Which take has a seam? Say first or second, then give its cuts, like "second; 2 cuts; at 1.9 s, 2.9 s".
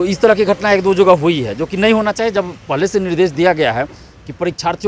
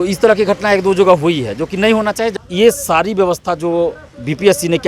second; 1 cut; at 2.3 s